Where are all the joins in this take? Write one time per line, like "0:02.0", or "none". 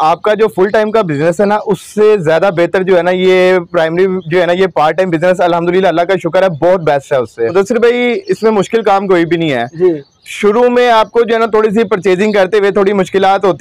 0:07.5